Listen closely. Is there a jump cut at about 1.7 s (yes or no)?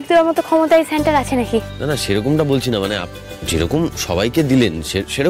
no